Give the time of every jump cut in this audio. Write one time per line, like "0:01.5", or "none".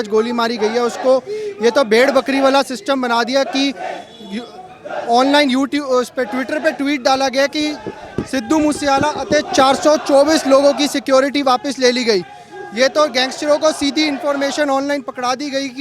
none